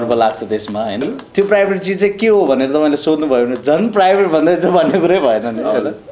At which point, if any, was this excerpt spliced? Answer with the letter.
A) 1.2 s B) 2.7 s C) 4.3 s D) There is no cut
A